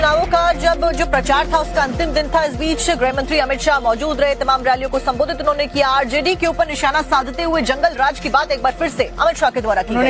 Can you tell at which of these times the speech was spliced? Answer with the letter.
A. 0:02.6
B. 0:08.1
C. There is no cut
A